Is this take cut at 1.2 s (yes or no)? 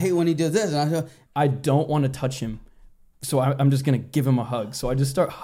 yes